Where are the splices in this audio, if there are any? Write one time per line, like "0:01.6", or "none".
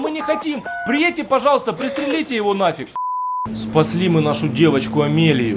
0:03.0